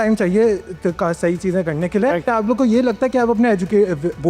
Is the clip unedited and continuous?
no; 1 cut; at 2.3 s

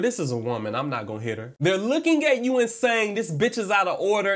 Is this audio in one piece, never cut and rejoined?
yes; 0 cuts

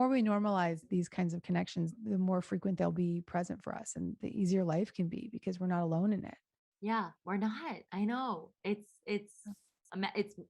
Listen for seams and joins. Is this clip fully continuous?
no; 2 cuts; at 0.8 s, 2.0 s

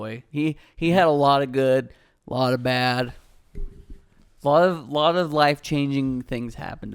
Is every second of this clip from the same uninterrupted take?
yes; 0 cuts

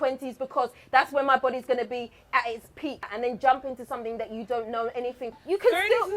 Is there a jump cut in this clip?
yes; 2 cuts; at 3.1 s, 5.3 s

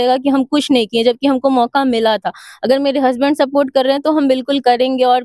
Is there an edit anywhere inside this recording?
no; 0 cuts

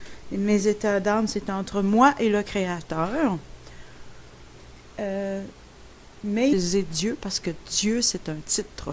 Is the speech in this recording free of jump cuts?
yes; 0 cuts

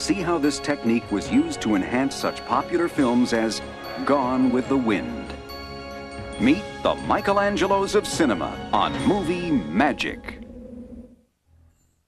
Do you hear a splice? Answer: no; 0 cuts

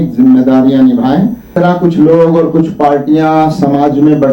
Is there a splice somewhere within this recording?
yes; 1 cut; at 1.5 s

